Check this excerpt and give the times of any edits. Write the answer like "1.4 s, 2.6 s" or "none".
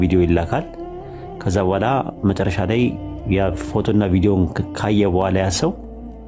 none